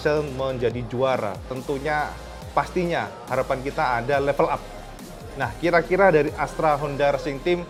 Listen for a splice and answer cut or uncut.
uncut